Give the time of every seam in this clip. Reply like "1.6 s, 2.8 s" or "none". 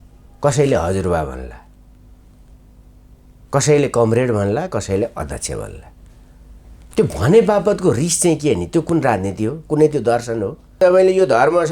10.8 s